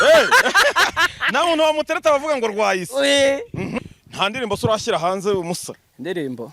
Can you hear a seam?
yes; 1 cut; at 3.7 s

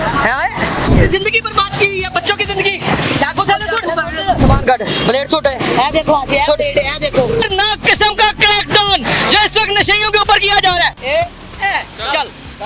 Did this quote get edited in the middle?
no; 0 cuts

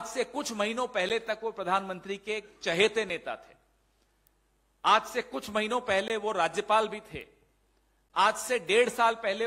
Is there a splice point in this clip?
no; 0 cuts

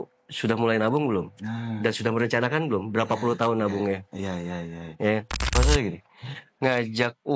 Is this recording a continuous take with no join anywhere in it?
no; 1 cut; at 5.5 s

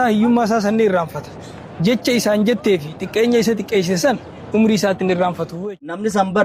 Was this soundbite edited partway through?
yes; 1 cut; at 5.5 s

